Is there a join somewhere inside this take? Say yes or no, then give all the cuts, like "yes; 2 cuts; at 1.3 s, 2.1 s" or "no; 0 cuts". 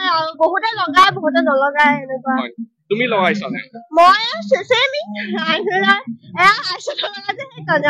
no; 0 cuts